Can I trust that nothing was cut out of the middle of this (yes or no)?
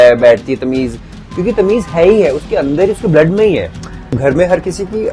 no